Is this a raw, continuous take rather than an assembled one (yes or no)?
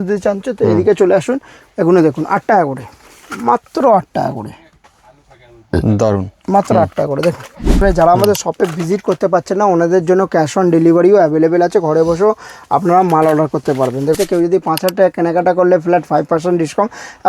no